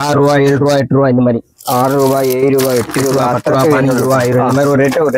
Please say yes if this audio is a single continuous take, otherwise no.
yes